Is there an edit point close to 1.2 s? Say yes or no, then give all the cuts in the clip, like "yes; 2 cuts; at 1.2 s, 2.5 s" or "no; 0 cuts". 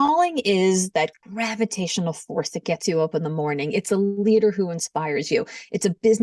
yes; 1 cut; at 1.2 s